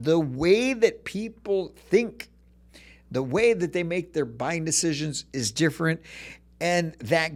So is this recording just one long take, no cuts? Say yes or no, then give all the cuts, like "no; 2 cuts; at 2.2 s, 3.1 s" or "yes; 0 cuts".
yes; 0 cuts